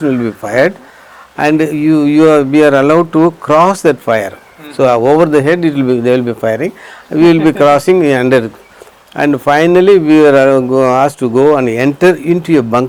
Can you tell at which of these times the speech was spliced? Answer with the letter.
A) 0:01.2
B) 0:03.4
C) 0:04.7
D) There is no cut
D